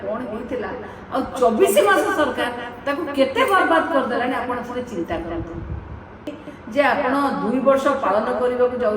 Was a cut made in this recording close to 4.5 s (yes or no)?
no